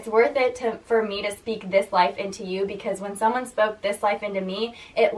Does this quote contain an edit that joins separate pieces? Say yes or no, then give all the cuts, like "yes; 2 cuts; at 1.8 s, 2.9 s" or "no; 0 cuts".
no; 0 cuts